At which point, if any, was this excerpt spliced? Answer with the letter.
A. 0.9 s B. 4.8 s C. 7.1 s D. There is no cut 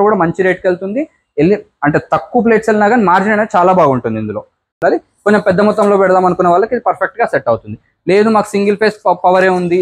B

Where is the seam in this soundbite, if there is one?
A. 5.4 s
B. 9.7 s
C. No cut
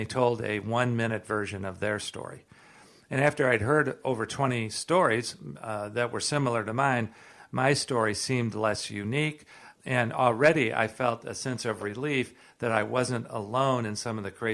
B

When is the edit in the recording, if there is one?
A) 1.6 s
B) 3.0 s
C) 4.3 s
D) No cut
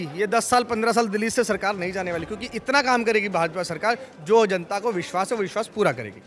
D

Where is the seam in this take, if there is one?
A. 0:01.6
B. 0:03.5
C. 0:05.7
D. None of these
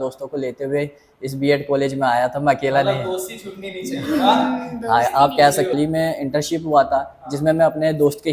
C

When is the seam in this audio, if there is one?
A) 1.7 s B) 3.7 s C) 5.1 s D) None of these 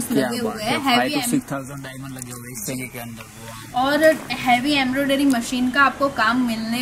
D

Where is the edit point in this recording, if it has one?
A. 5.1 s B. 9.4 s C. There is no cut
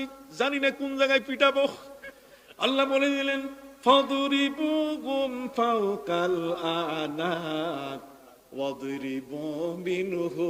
C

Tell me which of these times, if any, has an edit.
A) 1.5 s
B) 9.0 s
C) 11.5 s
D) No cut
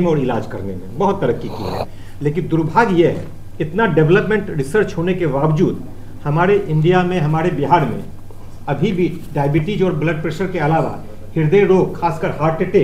D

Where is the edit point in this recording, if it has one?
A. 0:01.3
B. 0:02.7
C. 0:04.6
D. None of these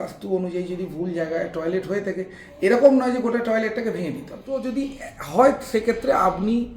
C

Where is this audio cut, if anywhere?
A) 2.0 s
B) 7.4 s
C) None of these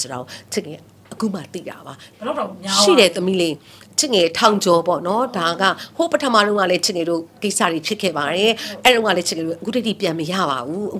A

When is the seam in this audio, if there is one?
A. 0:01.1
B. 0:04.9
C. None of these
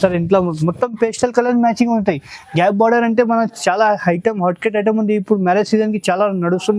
C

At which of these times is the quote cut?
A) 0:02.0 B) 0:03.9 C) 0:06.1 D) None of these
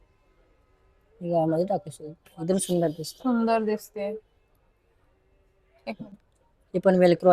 D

